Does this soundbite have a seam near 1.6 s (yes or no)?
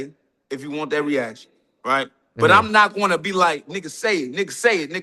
no